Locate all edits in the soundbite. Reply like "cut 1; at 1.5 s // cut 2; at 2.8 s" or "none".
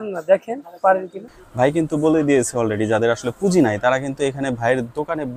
cut 1; at 1.2 s